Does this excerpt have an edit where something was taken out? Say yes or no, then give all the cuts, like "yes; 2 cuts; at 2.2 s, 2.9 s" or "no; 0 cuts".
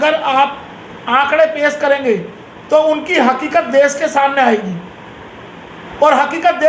no; 0 cuts